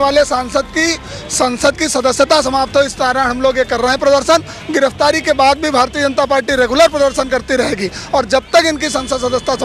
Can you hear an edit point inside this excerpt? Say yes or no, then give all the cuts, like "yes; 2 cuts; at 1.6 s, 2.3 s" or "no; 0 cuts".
no; 0 cuts